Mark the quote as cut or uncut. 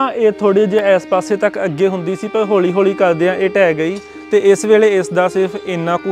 uncut